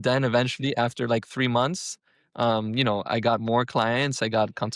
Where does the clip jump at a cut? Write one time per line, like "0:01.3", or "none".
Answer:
none

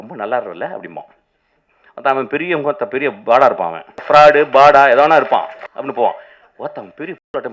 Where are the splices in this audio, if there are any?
0:03.9
0:05.6

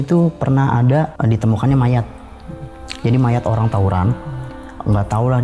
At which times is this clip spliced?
0:01.1

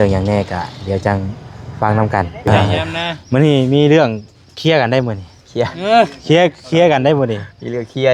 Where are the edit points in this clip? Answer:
0:02.6

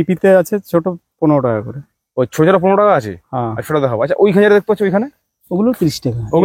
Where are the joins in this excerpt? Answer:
none

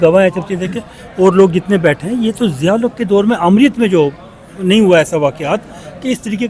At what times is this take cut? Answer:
none

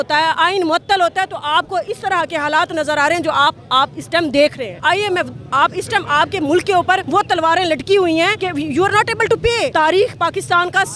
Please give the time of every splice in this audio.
0:04.8
0:07.0
0:08.4
0:09.7

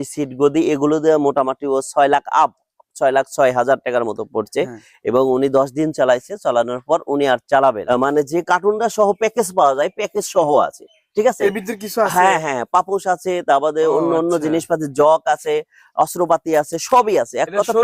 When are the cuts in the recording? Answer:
0:07.8

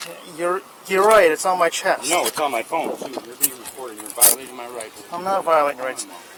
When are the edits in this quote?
none

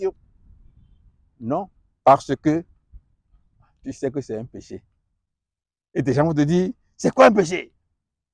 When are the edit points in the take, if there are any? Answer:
none

